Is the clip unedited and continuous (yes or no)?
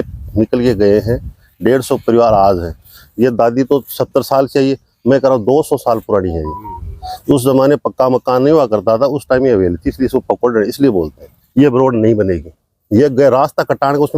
no